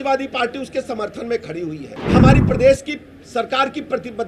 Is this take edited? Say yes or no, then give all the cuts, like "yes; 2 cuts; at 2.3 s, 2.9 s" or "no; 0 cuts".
yes; 1 cut; at 2.0 s